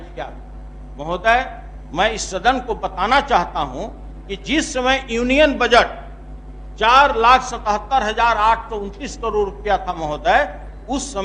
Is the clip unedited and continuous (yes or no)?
yes